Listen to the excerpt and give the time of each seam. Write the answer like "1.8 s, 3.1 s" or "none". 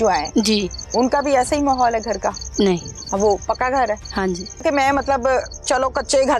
4.6 s